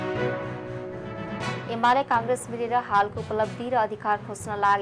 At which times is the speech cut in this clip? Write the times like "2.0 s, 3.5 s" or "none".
1.5 s